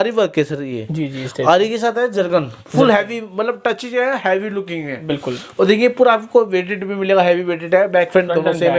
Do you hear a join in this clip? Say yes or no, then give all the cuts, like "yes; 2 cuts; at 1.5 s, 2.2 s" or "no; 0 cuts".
no; 0 cuts